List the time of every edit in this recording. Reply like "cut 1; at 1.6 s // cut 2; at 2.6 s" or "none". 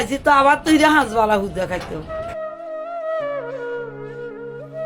none